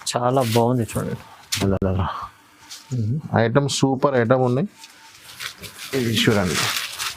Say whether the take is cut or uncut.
uncut